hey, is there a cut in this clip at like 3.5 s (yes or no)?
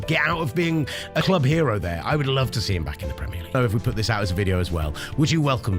yes